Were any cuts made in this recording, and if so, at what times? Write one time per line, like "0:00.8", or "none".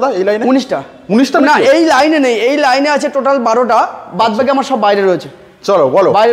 none